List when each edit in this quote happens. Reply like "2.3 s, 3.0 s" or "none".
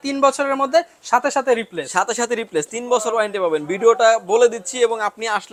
none